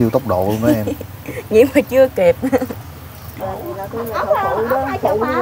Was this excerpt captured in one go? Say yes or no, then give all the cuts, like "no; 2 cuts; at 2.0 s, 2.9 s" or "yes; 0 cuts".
no; 1 cut; at 3.3 s